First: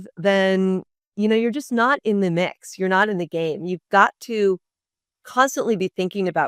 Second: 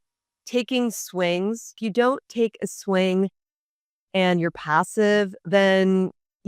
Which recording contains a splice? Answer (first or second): second